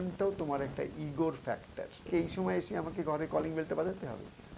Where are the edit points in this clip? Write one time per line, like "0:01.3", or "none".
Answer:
0:02.1